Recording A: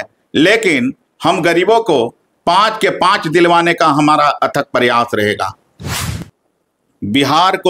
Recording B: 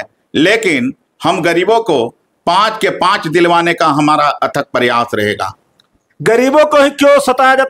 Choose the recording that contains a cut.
A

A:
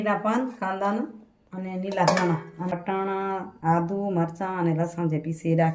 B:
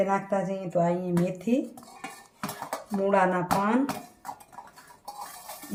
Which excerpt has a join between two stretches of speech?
A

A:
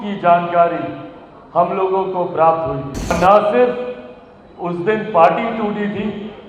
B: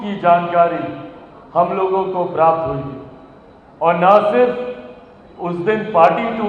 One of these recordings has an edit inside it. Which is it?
A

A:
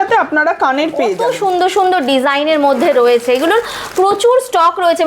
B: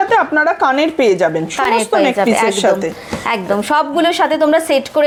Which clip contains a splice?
A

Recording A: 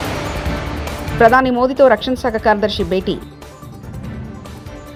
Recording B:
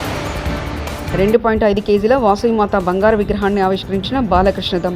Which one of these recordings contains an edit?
B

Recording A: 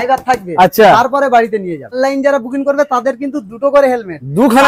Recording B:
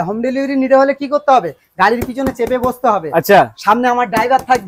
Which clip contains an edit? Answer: A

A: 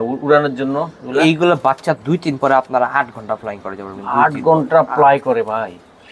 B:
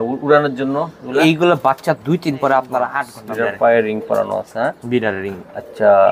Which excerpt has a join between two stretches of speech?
B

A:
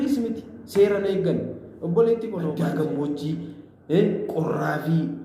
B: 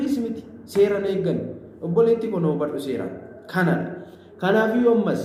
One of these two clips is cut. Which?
A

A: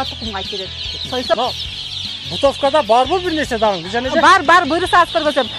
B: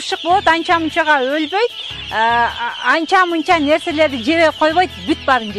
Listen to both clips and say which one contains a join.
A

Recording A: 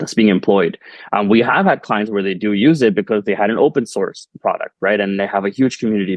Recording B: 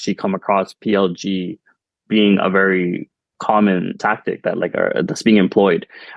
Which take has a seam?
B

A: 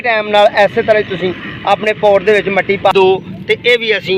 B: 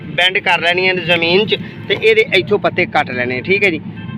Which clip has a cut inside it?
A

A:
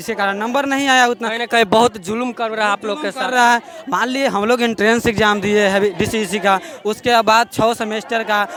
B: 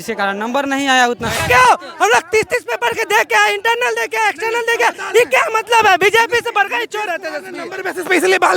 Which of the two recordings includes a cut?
B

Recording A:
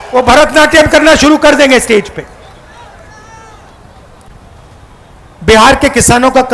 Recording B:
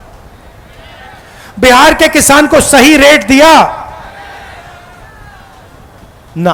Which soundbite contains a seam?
A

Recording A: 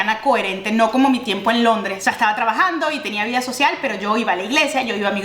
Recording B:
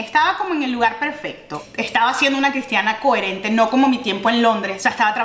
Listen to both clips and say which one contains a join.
B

